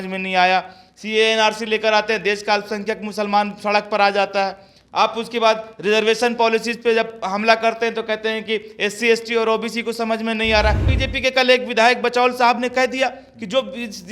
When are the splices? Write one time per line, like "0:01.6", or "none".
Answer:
0:10.9